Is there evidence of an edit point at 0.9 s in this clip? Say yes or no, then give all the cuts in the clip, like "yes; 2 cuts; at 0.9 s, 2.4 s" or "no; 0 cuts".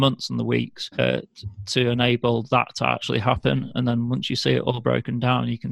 yes; 1 cut; at 0.9 s